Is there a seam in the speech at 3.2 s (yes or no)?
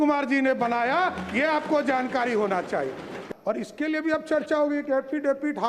yes